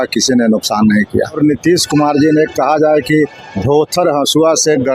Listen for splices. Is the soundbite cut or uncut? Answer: cut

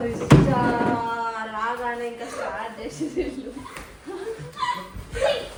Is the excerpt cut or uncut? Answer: uncut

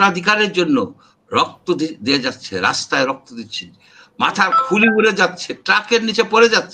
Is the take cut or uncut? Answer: uncut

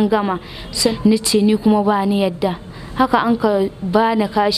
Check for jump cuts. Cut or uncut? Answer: cut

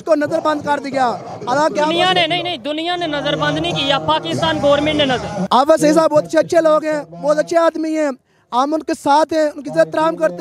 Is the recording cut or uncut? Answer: cut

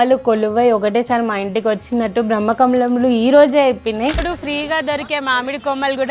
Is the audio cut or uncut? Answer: cut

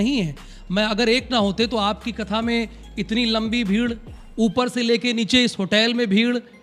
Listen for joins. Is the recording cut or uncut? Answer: uncut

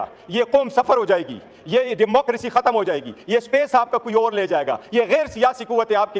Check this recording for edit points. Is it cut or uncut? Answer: uncut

